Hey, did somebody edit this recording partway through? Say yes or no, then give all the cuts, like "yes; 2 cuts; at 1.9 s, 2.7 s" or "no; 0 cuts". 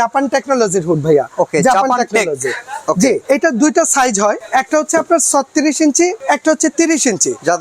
yes; 3 cuts; at 3.2 s, 4.4 s, 6.2 s